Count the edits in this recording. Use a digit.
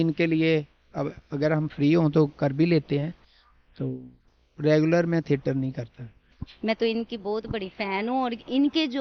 0